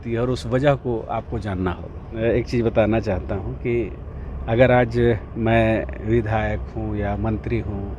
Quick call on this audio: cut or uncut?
cut